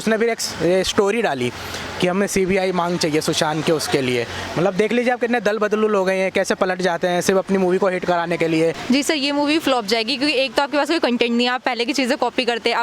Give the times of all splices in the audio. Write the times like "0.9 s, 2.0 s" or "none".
8.8 s